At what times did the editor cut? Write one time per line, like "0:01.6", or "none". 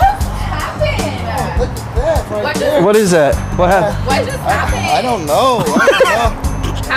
0:01.7